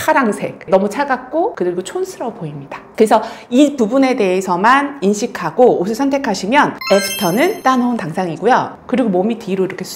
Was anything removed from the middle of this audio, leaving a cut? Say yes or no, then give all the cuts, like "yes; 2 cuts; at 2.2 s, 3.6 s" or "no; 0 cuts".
yes; 1 cut; at 8.7 s